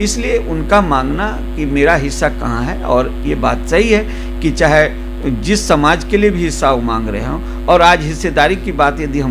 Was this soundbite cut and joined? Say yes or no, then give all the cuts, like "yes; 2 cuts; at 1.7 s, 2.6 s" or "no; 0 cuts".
no; 0 cuts